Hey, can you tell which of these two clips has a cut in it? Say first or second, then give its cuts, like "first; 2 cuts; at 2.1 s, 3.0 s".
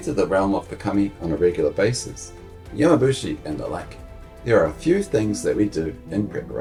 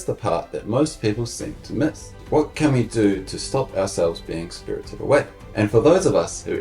second; 2 cuts; at 2.1 s, 5.4 s